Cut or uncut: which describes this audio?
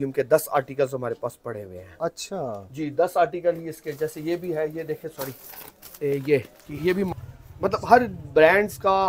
cut